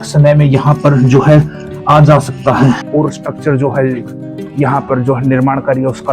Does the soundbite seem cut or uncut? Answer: cut